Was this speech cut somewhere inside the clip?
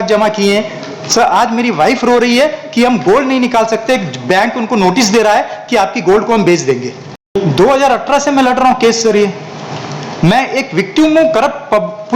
yes; 1 cut; at 7.4 s

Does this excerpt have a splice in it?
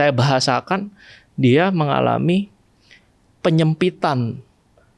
no; 0 cuts

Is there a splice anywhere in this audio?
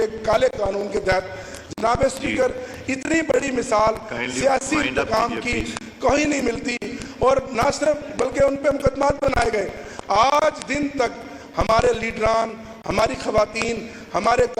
no; 0 cuts

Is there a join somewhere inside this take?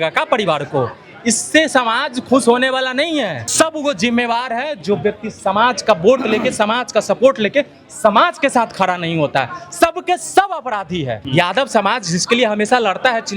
yes; 2 cuts; at 3.4 s, 11.2 s

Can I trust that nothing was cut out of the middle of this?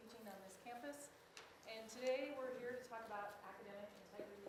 yes; 0 cuts

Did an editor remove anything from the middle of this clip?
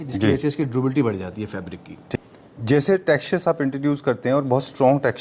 yes; 1 cut; at 2.0 s

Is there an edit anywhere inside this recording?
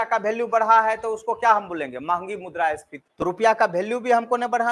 no; 0 cuts

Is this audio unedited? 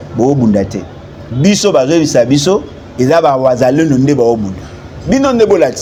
yes; 0 cuts

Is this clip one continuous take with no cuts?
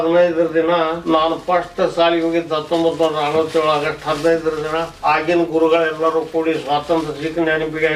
no; 2 cuts; at 1.0 s, 4.9 s

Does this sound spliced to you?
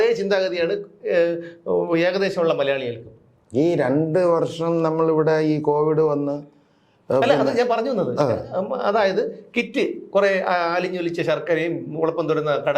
no; 0 cuts

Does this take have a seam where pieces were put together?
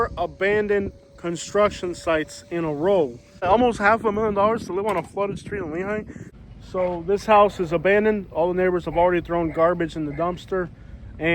yes; 2 cuts; at 3.5 s, 6.6 s

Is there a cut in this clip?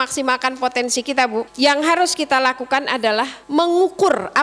yes; 2 cuts; at 1.5 s, 3.4 s

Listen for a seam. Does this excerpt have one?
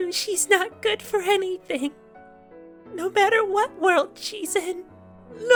no; 0 cuts

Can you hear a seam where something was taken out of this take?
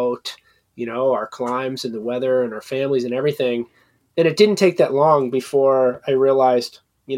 no; 0 cuts

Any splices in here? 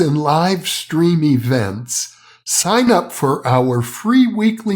no; 0 cuts

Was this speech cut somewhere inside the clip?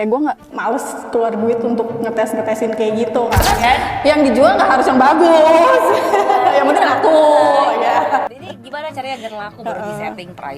yes; 1 cut; at 3.6 s

